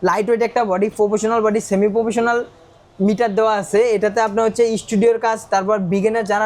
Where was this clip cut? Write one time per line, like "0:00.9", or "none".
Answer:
none